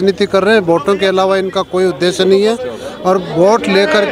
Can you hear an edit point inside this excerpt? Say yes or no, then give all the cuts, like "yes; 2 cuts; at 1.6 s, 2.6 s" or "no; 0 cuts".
no; 0 cuts